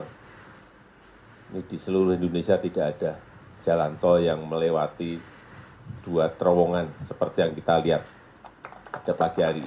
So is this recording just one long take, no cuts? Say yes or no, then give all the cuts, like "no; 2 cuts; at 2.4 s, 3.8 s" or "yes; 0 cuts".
yes; 0 cuts